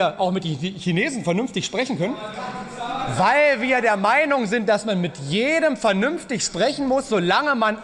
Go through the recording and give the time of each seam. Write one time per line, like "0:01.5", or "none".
none